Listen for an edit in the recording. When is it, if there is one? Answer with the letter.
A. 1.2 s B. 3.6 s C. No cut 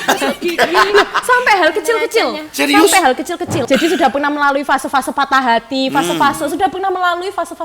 B